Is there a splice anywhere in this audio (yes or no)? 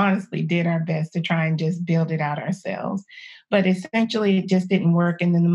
no